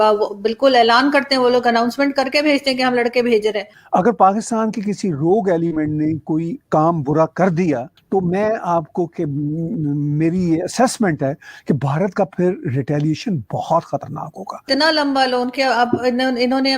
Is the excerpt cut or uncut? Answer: cut